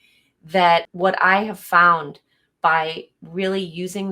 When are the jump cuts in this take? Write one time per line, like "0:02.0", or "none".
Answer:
0:00.9